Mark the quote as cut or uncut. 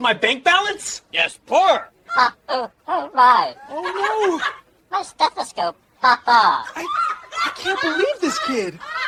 uncut